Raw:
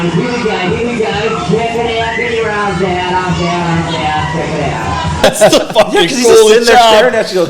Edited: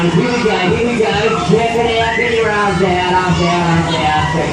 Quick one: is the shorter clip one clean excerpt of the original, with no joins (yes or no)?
yes